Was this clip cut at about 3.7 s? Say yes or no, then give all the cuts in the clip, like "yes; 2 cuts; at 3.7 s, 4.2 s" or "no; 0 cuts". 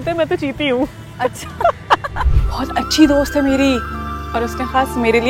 no; 1 cut; at 2.1 s